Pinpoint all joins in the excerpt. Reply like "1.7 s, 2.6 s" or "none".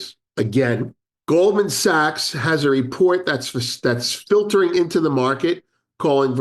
1.1 s